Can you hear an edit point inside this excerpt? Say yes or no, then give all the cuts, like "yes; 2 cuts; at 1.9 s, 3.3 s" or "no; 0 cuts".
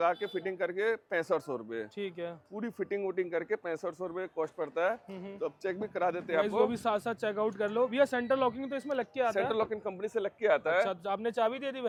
no; 0 cuts